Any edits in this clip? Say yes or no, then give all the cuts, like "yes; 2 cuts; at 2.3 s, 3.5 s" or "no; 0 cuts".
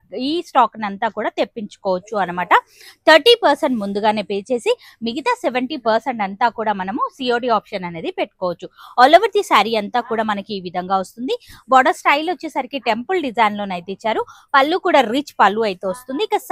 no; 0 cuts